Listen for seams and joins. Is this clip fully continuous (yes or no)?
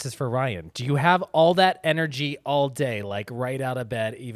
yes